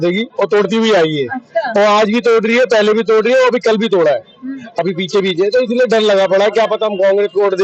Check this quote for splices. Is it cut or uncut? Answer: uncut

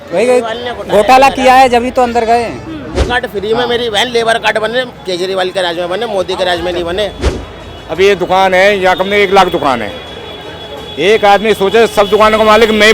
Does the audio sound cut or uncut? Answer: cut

